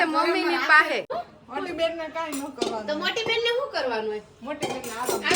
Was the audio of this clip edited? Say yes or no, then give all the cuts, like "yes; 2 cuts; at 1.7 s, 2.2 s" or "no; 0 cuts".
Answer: yes; 1 cut; at 1.1 s